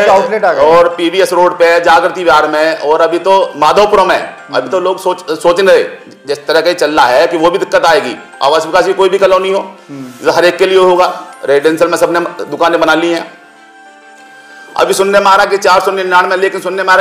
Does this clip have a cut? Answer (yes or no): no